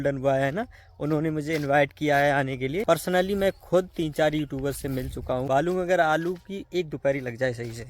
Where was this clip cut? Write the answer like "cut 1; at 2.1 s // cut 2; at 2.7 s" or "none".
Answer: cut 1; at 2.9 s // cut 2; at 5.4 s